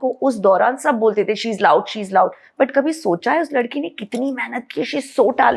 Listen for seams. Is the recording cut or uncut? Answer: uncut